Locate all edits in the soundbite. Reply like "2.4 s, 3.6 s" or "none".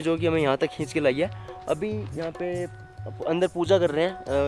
none